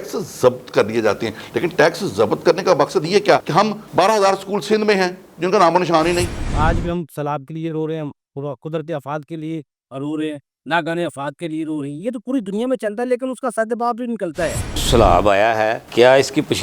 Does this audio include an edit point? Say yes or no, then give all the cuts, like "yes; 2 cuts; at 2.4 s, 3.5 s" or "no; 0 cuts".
yes; 2 cuts; at 6.3 s, 14.8 s